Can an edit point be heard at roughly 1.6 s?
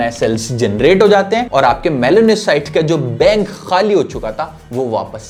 no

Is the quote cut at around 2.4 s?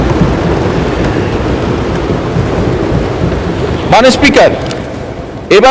yes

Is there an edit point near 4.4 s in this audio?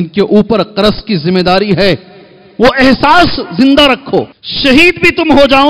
yes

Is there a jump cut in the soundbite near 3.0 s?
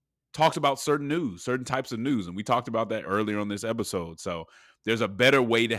yes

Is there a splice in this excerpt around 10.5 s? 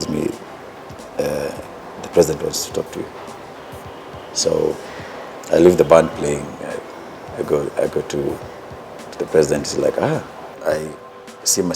yes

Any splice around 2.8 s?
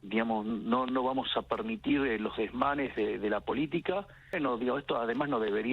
no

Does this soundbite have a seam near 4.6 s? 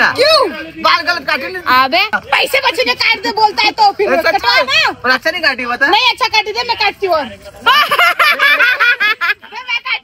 no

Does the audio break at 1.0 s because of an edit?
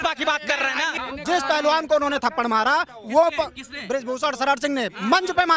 yes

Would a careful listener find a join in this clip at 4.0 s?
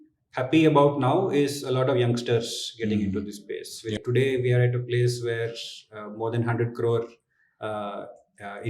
yes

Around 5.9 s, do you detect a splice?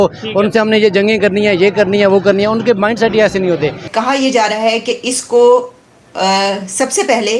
no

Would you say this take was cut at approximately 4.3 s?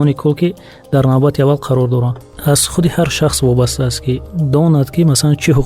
no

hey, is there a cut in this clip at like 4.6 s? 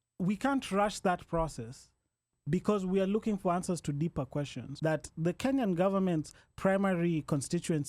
yes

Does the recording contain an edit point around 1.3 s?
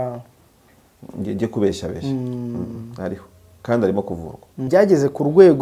no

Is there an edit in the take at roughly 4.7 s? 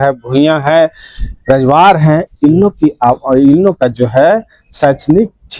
no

